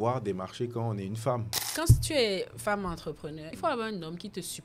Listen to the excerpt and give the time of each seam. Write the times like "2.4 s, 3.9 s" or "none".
1.7 s, 3.5 s